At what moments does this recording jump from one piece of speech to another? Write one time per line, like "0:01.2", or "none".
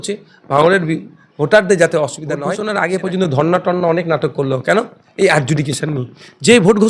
0:02.5